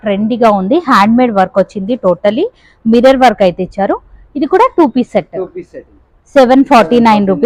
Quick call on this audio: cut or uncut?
uncut